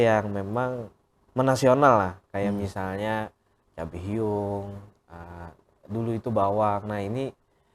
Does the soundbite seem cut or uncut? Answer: uncut